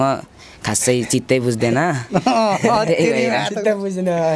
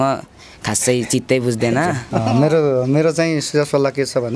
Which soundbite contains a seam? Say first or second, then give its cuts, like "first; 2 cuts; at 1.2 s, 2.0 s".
second; 1 cut; at 2.1 s